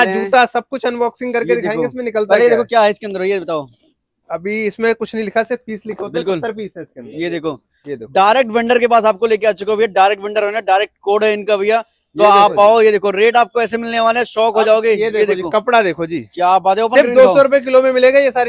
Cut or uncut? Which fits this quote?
uncut